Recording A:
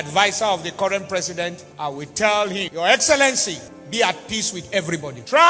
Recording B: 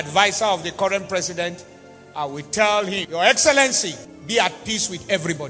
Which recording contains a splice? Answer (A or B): A